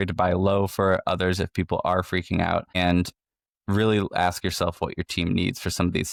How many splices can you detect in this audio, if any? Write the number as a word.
zero